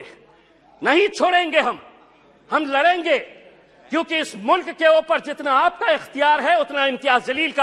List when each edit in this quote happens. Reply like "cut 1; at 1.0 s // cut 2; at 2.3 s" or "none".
none